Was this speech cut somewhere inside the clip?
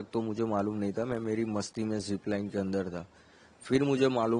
no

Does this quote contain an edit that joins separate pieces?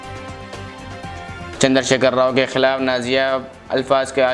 yes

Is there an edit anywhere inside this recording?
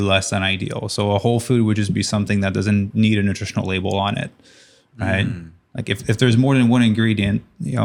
no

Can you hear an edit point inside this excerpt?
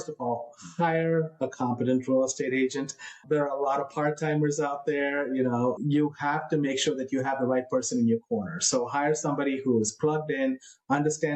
yes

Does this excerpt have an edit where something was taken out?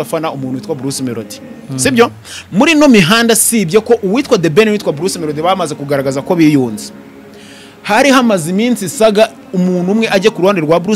no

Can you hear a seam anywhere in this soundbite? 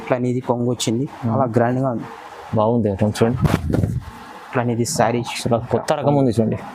yes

